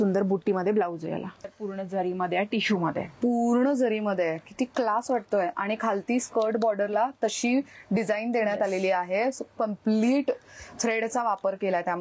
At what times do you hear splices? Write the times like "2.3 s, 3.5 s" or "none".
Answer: 1.5 s